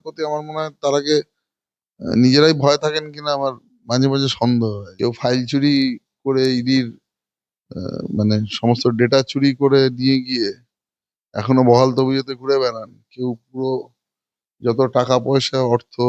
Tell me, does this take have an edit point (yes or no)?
yes